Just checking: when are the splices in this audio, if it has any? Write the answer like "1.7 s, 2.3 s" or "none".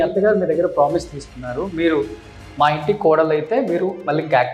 none